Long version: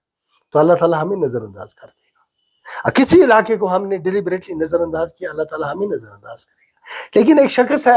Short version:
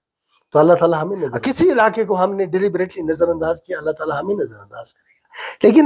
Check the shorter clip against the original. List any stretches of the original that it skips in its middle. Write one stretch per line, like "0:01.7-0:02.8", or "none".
0:01.3-0:02.9